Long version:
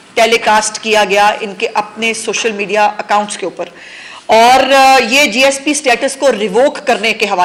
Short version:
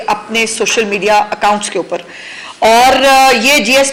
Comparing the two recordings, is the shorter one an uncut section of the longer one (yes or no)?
yes